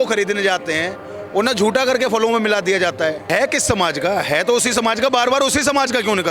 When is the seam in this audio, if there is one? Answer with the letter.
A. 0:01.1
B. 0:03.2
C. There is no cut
B